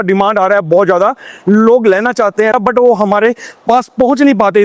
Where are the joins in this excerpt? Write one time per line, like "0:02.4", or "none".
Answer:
0:02.5